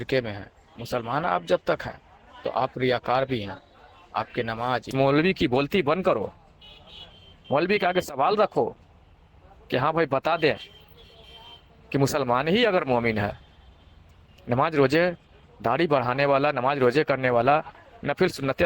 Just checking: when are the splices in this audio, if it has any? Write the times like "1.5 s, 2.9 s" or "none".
4.9 s

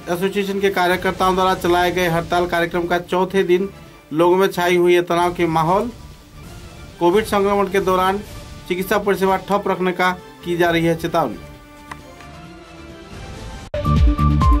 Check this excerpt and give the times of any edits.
13.6 s

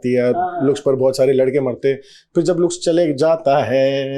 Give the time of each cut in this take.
none

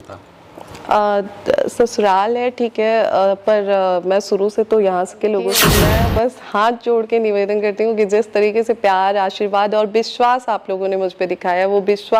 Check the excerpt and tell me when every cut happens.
5.7 s

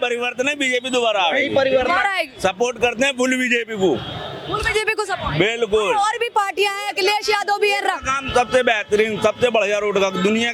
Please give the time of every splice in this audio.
none

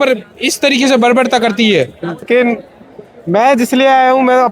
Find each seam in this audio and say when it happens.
2.3 s

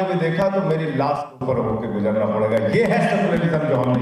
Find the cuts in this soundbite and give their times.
none

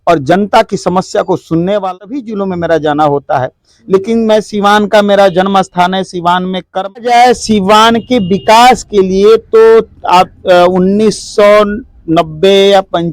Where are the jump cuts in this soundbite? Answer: 1.8 s, 7.0 s

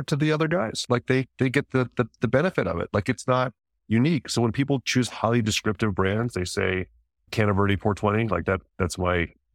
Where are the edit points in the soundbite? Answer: none

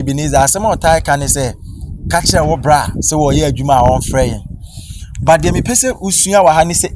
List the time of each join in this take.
none

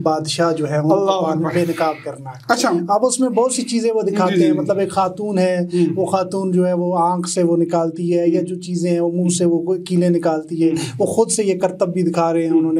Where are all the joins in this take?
none

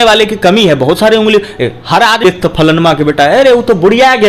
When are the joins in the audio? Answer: 2.2 s

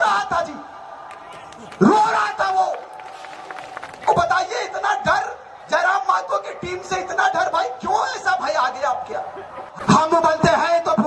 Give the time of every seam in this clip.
9.8 s

